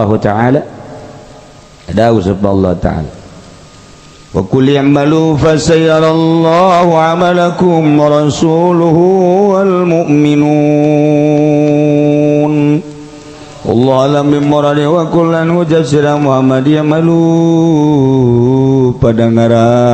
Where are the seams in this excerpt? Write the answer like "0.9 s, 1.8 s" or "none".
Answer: none